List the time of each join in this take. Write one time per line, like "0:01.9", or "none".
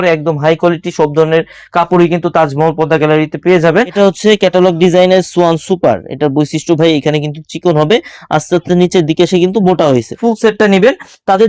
0:03.9
0:10.2

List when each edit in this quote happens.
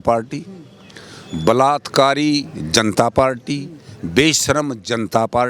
none

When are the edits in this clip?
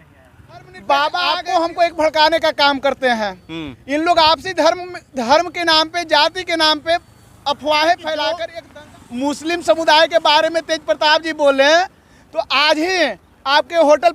0:01.3
0:08.5

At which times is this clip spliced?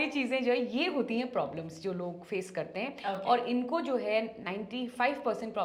none

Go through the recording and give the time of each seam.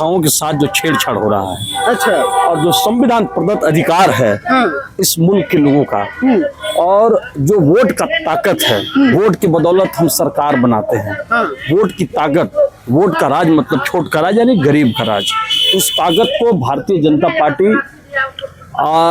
none

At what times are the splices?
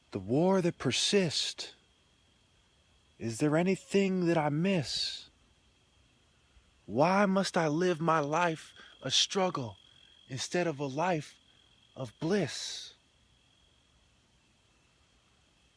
0:10.9

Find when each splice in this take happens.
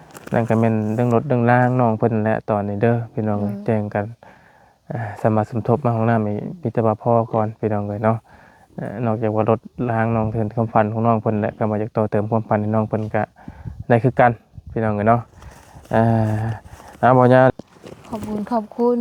0:17.5

